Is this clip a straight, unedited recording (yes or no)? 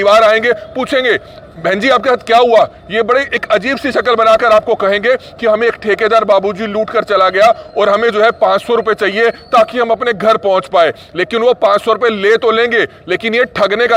yes